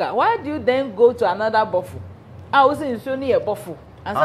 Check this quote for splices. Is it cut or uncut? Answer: uncut